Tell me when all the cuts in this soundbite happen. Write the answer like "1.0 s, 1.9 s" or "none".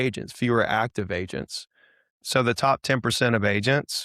2.2 s